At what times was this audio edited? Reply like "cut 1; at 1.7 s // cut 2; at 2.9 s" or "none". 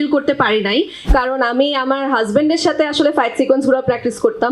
cut 1; at 1.1 s